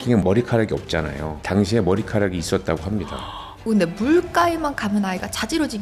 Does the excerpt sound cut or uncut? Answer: cut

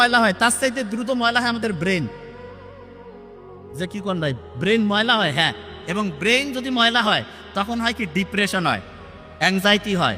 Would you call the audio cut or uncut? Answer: uncut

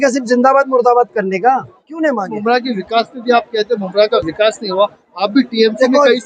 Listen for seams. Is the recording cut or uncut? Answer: cut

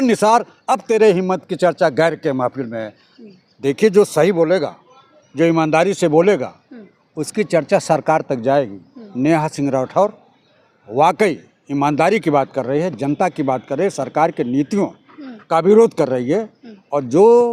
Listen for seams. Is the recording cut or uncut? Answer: uncut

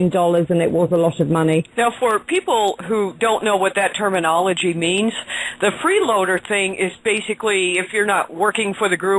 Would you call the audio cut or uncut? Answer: cut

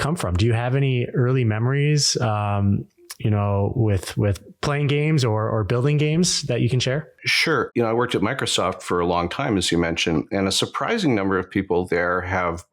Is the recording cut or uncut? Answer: cut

